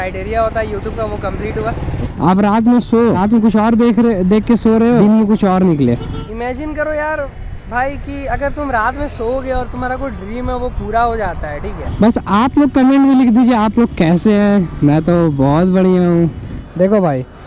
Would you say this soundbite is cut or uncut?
cut